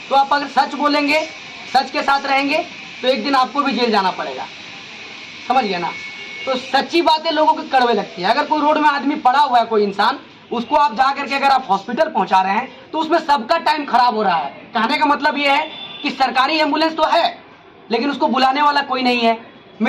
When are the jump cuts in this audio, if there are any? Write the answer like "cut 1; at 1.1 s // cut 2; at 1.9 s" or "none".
none